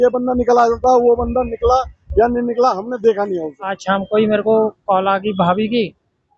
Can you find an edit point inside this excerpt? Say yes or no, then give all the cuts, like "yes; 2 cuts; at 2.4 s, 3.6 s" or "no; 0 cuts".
yes; 1 cut; at 3.8 s